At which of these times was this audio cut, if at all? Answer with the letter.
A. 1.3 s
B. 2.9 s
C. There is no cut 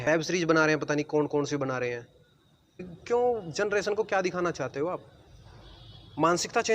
B